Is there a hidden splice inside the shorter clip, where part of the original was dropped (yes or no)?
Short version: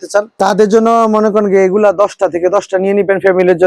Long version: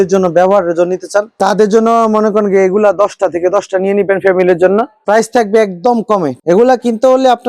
no